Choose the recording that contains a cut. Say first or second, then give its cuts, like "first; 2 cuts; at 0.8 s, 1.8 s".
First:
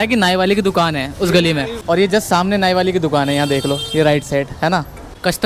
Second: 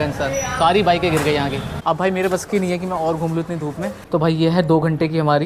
second; 2 cuts; at 1.7 s, 4.0 s